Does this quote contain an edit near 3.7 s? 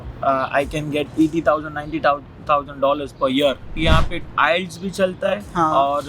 yes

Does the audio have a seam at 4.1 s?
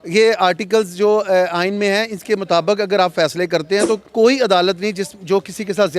yes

